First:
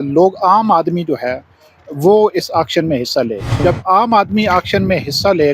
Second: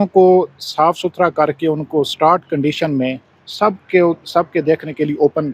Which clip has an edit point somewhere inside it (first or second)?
first